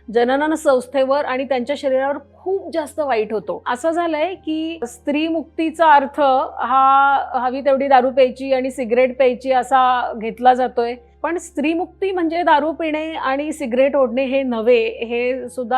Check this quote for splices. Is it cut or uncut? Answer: uncut